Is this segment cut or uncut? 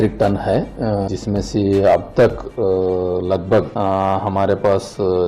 cut